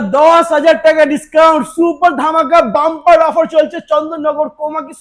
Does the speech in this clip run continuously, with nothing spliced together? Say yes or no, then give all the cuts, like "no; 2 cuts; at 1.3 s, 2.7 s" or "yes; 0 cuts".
yes; 0 cuts